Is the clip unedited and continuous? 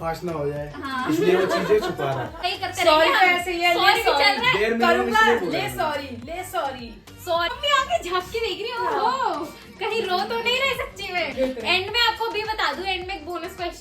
no; 3 cuts; at 2.4 s, 7.5 s, 11.3 s

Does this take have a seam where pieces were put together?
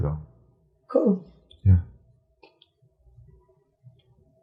no; 0 cuts

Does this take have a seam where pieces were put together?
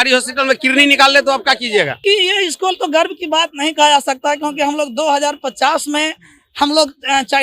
yes; 1 cut; at 2.0 s

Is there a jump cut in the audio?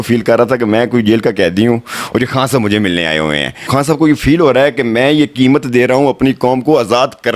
yes; 1 cut; at 3.7 s

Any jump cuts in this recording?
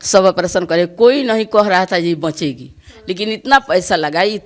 no; 0 cuts

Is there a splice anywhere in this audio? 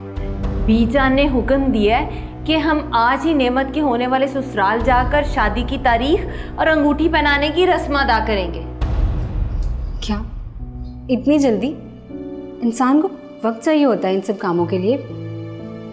no; 0 cuts

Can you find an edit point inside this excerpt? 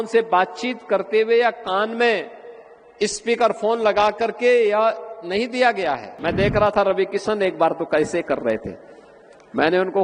yes; 1 cut; at 6.1 s

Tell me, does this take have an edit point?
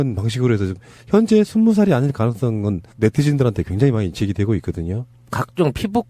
no; 0 cuts

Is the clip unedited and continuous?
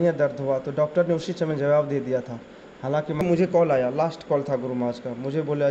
no; 1 cut; at 3.2 s

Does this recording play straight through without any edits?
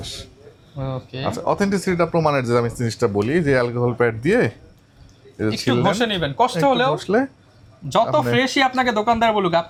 yes; 0 cuts

